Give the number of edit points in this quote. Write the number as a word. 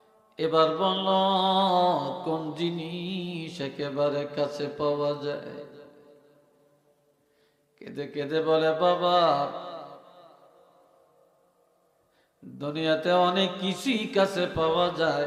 zero